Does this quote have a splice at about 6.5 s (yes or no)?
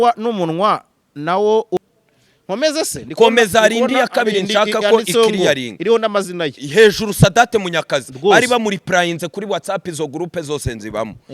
no